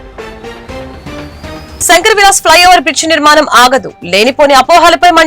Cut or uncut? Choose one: cut